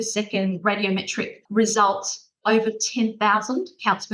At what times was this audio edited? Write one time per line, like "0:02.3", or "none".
0:01.4
0:02.4